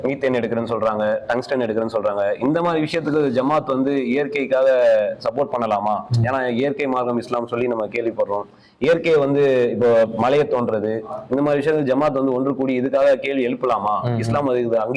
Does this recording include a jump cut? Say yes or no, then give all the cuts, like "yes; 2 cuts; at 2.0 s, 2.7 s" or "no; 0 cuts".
no; 0 cuts